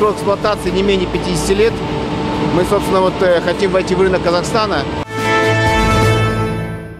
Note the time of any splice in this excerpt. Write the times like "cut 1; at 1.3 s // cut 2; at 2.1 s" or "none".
cut 1; at 5.1 s